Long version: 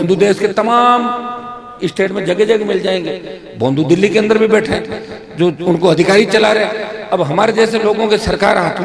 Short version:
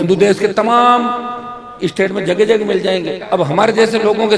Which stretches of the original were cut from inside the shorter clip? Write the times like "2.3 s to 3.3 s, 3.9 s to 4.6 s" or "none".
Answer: 3.2 s to 7.0 s